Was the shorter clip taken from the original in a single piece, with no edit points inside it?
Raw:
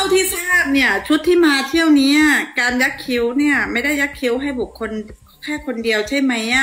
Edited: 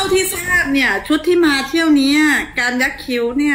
yes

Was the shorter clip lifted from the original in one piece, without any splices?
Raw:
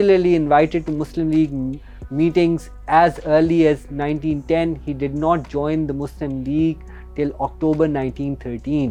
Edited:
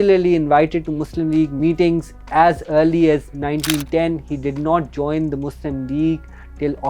no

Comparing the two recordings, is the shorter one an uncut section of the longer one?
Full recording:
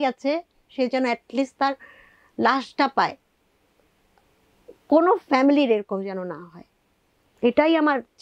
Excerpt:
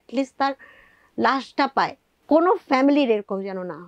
no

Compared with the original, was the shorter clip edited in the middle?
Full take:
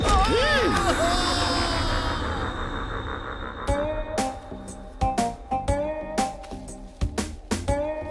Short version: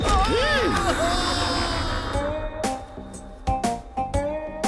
yes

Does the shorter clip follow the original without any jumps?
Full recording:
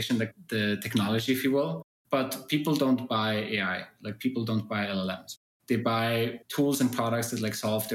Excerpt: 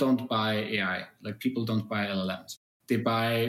yes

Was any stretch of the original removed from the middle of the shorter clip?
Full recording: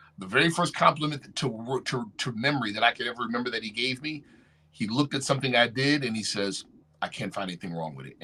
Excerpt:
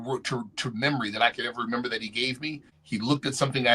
yes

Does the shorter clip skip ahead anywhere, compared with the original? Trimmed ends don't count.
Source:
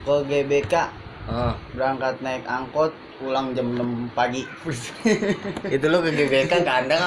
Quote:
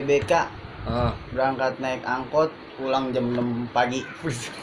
no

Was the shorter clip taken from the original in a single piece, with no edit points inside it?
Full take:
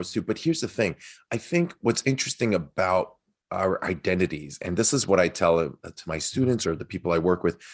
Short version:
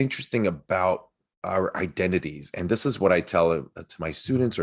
yes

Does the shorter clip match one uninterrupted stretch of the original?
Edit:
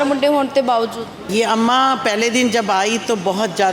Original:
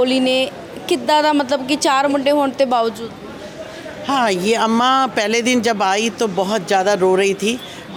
no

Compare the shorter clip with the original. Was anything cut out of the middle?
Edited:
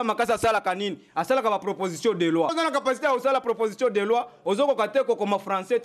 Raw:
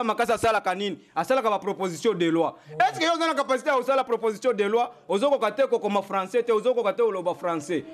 yes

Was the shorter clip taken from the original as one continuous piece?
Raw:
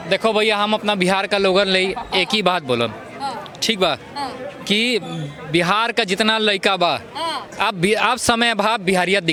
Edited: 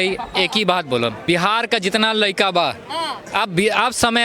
no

